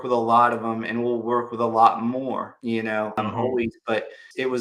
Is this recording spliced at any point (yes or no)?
no